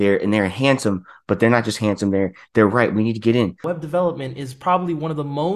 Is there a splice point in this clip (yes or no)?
yes